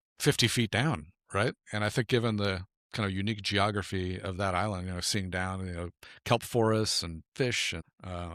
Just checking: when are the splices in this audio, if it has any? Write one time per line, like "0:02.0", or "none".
none